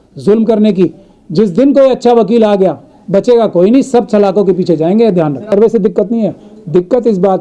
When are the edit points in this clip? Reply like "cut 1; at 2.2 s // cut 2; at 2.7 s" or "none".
cut 1; at 5.5 s

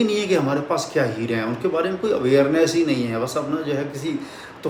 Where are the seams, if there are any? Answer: none

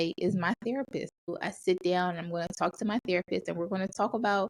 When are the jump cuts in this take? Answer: cut 1; at 1.3 s

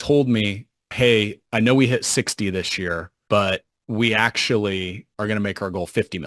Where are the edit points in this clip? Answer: cut 1; at 1.1 s // cut 2; at 3.1 s // cut 3; at 3.7 s // cut 4; at 5.0 s

